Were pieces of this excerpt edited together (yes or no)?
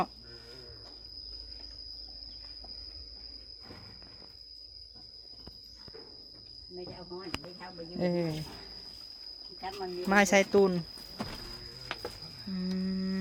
no